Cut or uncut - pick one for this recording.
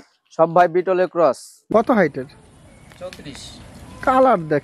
cut